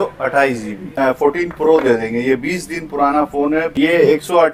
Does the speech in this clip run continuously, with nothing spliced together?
no; 2 cuts; at 0.9 s, 3.5 s

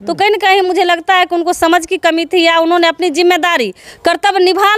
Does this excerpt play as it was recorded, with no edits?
no; 1 cut; at 3.8 s

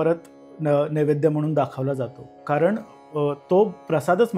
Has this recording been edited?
no; 0 cuts

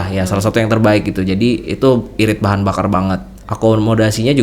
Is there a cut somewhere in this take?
yes; 1 cut; at 3.4 s

